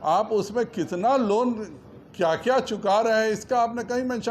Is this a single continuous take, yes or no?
yes